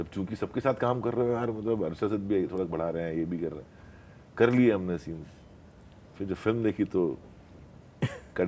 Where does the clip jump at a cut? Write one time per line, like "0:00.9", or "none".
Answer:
none